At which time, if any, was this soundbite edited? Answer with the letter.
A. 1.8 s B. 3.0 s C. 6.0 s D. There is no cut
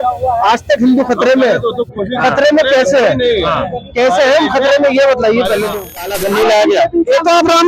C